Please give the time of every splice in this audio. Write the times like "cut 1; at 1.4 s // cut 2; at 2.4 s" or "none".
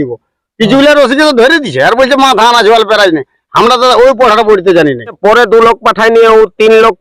cut 1; at 5.2 s